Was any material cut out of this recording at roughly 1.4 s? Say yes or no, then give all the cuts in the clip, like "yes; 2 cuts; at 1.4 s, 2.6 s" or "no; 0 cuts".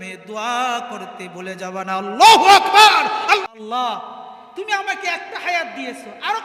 no; 1 cut; at 3.6 s